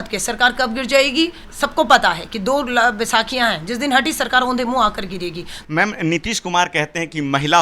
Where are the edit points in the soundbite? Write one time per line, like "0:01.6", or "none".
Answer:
0:01.4
0:05.5

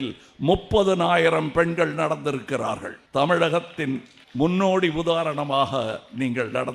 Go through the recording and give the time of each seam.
0:02.9
0:04.2

